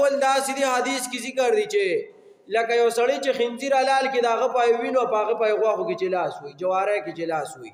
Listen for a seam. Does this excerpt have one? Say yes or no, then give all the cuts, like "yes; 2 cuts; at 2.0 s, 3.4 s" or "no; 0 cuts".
no; 0 cuts